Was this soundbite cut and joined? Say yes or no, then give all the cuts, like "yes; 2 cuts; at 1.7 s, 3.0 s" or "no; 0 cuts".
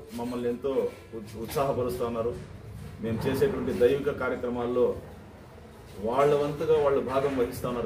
no; 0 cuts